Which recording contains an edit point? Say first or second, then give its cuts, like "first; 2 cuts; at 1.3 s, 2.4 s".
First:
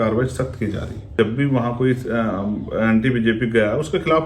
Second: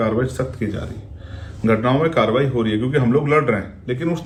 first; 1 cut; at 1.1 s